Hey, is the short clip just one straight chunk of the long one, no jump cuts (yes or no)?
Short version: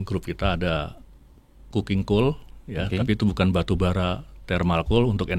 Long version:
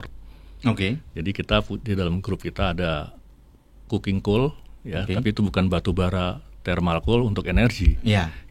yes